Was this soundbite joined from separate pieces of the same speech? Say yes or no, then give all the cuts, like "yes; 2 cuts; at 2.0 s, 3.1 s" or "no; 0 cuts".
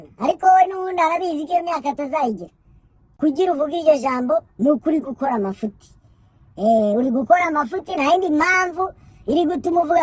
yes; 1 cut; at 3.0 s